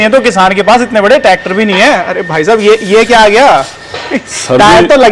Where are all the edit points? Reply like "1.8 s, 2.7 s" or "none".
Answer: none